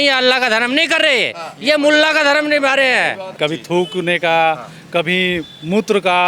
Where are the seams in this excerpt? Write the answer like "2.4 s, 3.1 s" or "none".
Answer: 3.3 s